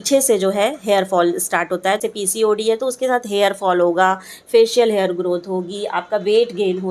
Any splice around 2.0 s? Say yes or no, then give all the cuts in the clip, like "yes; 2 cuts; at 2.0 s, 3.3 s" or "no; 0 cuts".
yes; 1 cut; at 2.0 s